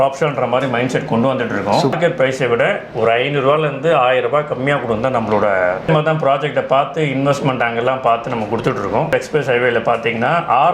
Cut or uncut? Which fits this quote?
cut